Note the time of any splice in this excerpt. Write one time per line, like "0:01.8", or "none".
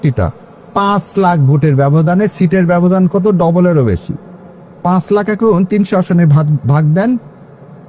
none